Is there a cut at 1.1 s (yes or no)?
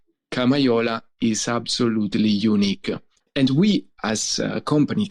no